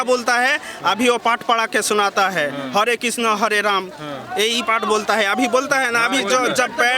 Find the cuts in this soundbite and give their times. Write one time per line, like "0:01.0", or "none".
none